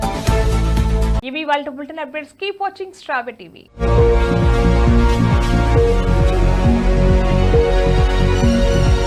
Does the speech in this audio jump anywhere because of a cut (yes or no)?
no